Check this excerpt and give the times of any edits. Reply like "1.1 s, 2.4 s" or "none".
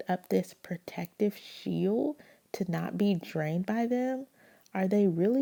none